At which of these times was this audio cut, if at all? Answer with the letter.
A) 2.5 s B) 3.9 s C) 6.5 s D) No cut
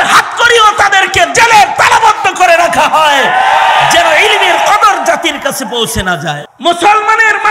C